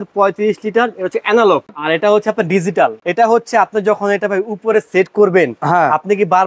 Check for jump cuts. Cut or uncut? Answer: cut